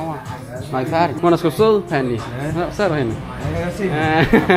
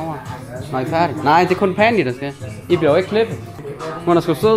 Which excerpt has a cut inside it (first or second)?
first